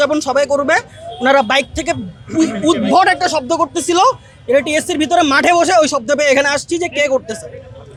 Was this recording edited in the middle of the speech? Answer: no; 0 cuts

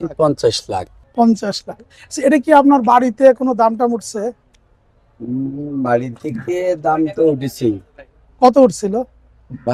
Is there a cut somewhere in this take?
yes; 1 cut; at 1.0 s

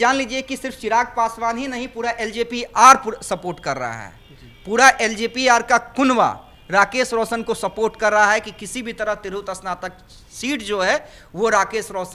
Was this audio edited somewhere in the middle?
no; 0 cuts

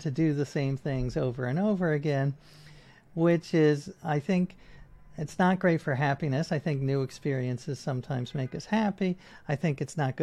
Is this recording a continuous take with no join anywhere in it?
yes; 0 cuts

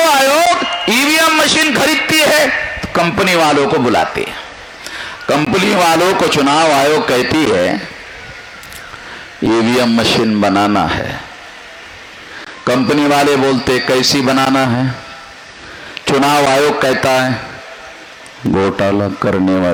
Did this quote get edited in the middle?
no; 0 cuts

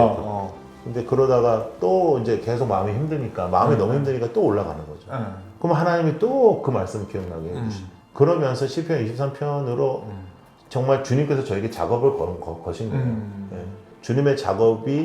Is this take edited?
yes; 1 cut; at 13.9 s

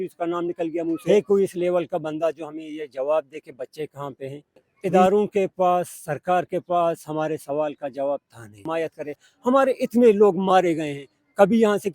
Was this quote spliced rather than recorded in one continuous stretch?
yes; 3 cuts; at 1.0 s, 4.7 s, 8.6 s

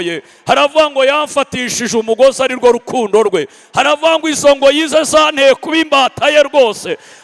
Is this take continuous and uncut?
yes; 0 cuts

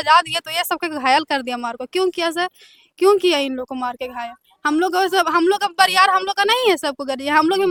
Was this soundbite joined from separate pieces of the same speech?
no; 0 cuts

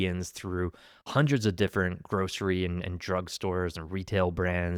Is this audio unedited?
yes; 0 cuts

